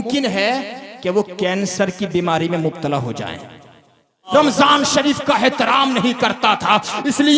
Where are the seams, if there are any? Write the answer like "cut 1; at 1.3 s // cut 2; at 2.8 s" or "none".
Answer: cut 1; at 4.3 s